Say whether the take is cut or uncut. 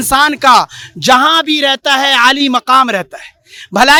uncut